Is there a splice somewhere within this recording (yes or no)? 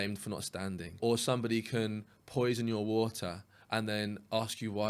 yes